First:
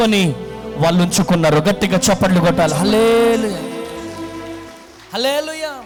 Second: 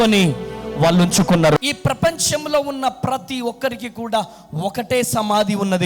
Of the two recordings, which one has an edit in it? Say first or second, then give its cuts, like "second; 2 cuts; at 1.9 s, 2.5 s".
second; 1 cut; at 1.6 s